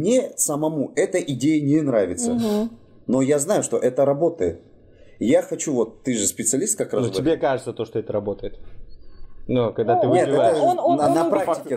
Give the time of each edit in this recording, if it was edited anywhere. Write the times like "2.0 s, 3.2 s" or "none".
none

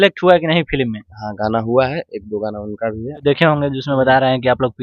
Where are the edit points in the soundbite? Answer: 3.2 s

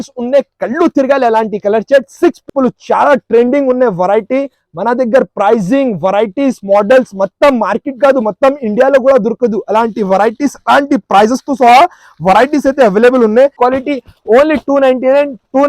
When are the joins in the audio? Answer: 2.5 s, 13.5 s

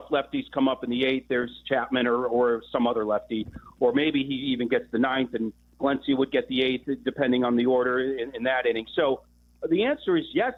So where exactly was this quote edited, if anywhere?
none

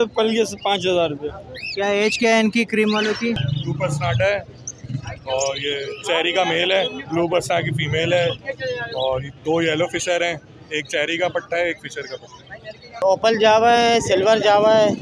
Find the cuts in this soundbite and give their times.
3.4 s, 13.0 s

